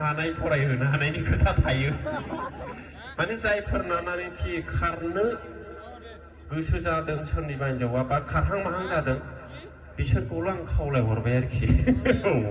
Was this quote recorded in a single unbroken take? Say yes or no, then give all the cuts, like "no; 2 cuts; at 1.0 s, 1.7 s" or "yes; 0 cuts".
yes; 0 cuts